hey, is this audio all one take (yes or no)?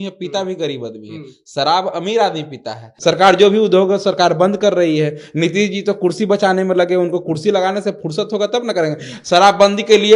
no